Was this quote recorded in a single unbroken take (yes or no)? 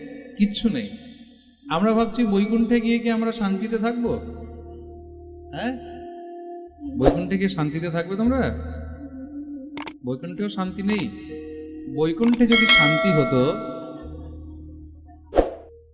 yes